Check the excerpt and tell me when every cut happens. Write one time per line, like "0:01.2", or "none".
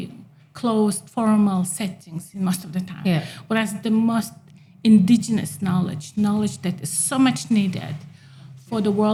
none